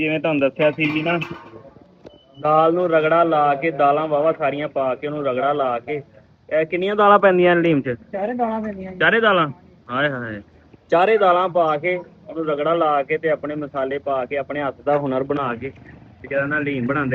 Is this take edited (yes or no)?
no